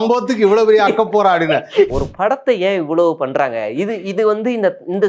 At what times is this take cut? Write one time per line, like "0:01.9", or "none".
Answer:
0:01.9

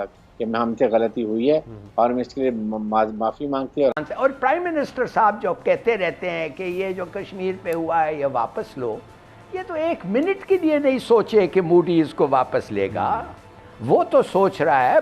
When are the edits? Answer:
0:04.0

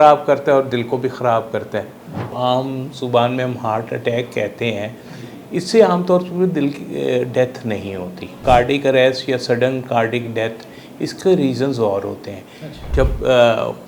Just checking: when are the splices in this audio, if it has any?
0:02.3
0:08.4
0:12.8

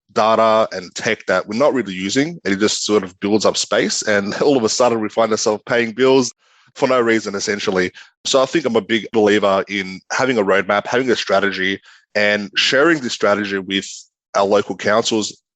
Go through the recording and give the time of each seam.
0:06.3

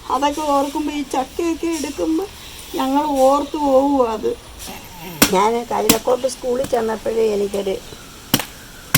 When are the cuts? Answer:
0:04.7

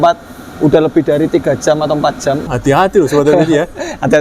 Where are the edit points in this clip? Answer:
0:02.5

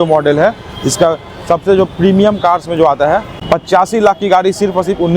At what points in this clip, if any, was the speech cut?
0:03.3

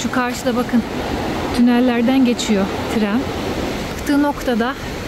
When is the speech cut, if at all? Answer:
0:04.0

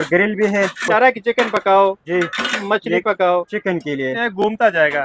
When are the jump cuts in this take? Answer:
0:00.8
0:03.5

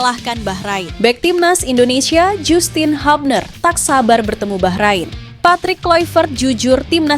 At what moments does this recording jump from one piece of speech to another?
0:00.9
0:05.2

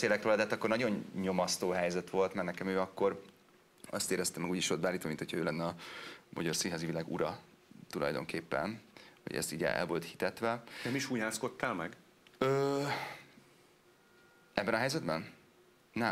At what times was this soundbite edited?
none

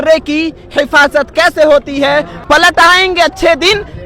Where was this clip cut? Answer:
0:02.3

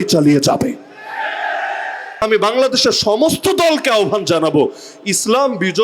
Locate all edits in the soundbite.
0:02.2

